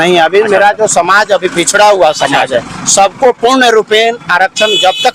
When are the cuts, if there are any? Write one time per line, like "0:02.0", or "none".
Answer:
none